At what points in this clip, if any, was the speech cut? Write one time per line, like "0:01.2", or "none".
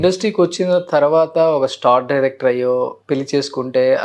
0:03.0